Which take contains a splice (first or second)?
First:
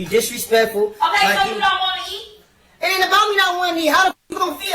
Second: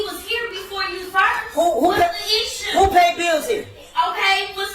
first